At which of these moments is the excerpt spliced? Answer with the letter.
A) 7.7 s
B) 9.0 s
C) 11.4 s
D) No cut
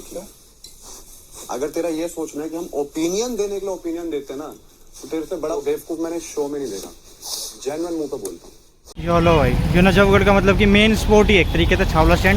B